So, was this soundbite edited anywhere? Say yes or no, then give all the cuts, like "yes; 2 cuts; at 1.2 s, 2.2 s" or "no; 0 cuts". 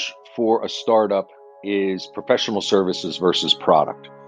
no; 0 cuts